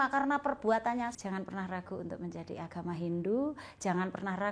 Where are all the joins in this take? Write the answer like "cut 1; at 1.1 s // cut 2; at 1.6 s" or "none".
cut 1; at 1.1 s